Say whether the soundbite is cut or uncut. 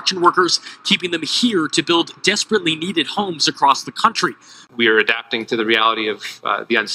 cut